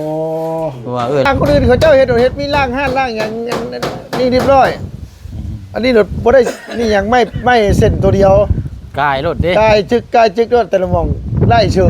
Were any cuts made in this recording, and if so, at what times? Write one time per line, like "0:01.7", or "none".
0:01.3